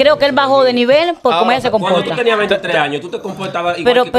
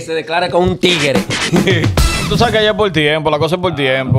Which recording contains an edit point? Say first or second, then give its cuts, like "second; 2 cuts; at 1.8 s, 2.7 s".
second; 1 cut; at 2.3 s